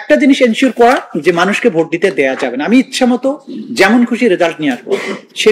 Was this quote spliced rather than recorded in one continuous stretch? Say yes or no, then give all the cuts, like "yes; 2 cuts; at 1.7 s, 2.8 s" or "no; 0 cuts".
no; 0 cuts